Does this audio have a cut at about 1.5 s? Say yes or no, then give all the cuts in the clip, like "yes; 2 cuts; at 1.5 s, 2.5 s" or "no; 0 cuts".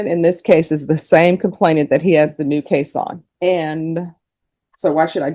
no; 1 cut; at 3.2 s